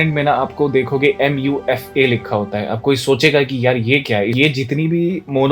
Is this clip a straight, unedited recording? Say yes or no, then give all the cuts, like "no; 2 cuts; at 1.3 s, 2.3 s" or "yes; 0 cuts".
no; 1 cut; at 4.3 s